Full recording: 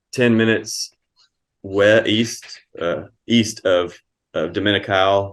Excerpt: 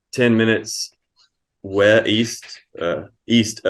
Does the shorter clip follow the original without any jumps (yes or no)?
yes